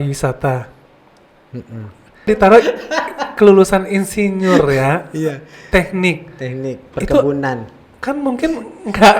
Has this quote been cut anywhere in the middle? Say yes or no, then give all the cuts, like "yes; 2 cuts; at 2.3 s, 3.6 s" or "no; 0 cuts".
yes; 1 cut; at 2.3 s